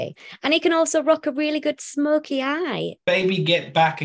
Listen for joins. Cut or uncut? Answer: cut